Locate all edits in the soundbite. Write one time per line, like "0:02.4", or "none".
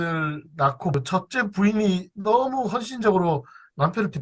0:00.9